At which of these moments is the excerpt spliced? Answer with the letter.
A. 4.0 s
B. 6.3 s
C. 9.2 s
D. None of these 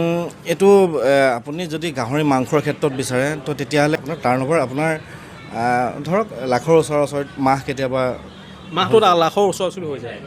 A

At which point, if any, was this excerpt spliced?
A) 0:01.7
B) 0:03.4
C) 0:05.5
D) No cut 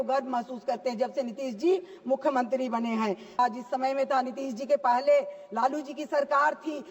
B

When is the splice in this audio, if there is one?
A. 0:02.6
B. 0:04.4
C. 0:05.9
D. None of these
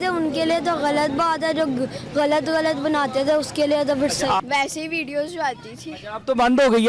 B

